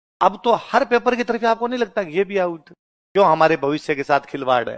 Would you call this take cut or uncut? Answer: cut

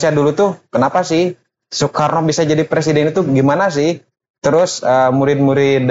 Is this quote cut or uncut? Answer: uncut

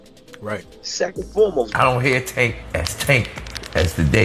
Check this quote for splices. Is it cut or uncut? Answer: cut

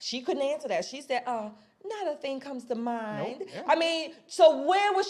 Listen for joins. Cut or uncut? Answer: uncut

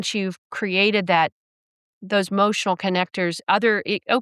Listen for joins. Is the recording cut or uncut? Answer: uncut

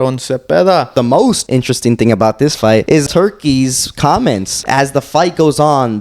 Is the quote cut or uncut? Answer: cut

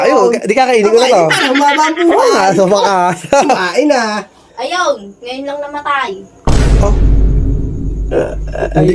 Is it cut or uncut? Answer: uncut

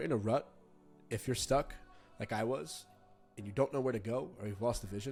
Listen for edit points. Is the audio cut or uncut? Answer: uncut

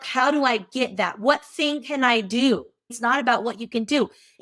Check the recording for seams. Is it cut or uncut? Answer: cut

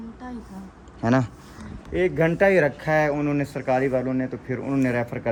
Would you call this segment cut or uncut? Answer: uncut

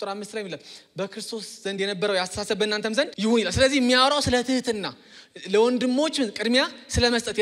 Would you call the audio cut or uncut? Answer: cut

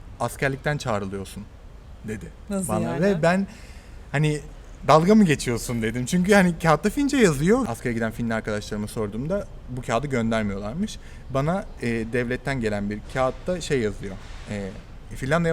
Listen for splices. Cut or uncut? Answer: cut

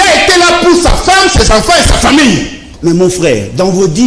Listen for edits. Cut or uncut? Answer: cut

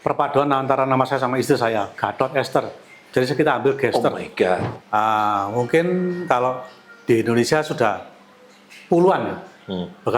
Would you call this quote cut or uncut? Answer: cut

